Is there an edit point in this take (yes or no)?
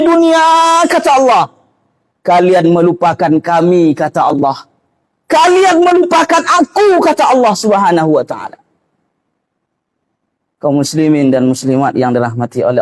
no